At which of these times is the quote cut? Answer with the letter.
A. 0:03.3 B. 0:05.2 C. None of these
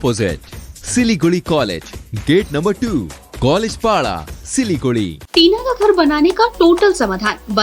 B